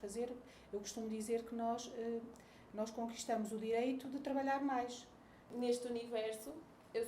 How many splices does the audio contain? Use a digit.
1